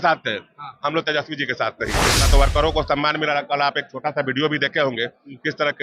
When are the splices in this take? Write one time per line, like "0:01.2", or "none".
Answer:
0:02.1

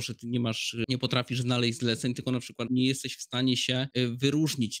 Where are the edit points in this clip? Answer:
0:00.8
0:02.6
0:03.9

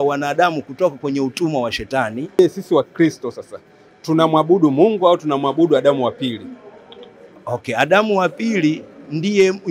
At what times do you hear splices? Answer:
0:02.4

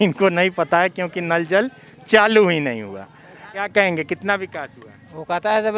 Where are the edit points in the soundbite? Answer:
none

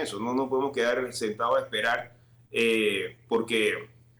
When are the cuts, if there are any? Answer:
none

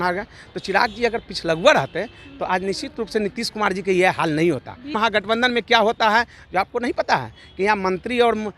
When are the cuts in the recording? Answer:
0:04.9

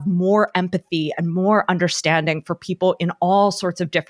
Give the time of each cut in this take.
none

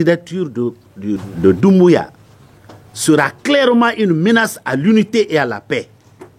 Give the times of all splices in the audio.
0:01.3

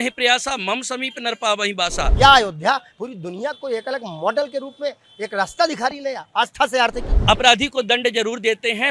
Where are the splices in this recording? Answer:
0:02.1
0:07.1

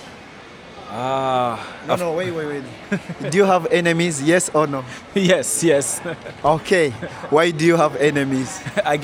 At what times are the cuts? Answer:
none

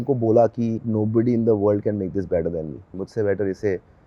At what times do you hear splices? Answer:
0:00.8
0:03.0

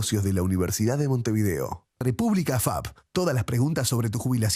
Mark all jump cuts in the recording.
0:01.8

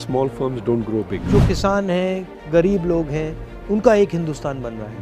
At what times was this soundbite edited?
0:01.2

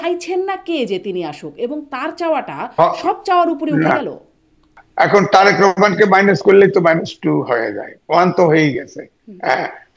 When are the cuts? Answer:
0:04.8

